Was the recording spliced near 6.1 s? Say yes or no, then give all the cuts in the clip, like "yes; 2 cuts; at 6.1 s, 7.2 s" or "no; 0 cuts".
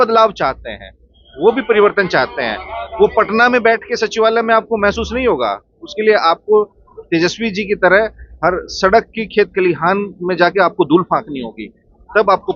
no; 0 cuts